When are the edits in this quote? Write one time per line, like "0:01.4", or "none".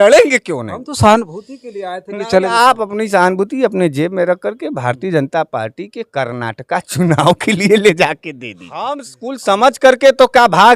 0:09.0